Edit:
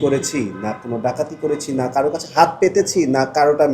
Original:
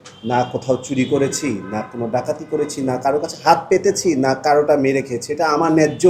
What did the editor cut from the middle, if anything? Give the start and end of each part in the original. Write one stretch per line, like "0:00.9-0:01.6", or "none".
none